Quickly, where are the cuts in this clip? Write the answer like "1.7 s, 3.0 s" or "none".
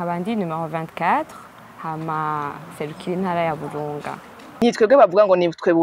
4.6 s